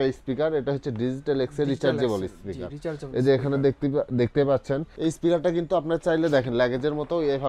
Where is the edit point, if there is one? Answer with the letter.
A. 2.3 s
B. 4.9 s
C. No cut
B